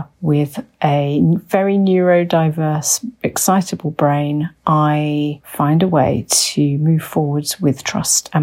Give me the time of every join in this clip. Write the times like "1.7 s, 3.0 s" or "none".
none